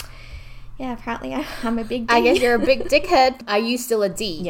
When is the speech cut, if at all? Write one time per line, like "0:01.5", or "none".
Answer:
0:03.3